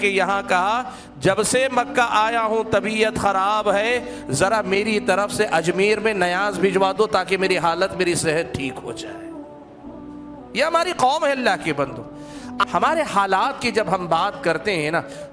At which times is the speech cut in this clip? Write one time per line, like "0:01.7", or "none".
0:12.5